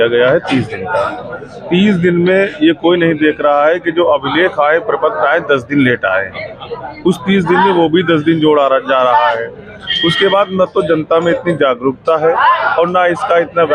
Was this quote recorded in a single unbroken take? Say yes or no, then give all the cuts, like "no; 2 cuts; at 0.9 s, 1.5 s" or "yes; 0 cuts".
yes; 0 cuts